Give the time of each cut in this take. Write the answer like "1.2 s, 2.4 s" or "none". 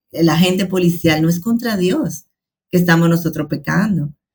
none